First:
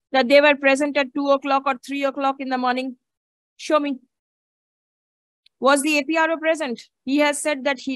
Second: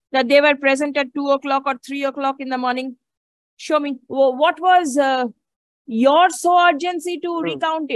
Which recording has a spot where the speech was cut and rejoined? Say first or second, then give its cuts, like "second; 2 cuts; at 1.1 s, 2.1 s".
second; 1 cut; at 4.0 s